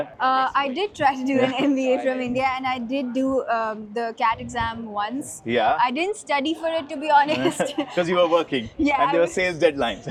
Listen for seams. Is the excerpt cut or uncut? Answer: uncut